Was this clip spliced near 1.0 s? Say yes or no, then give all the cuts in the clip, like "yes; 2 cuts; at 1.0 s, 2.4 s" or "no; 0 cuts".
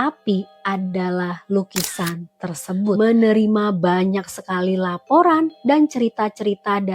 no; 1 cut; at 3.0 s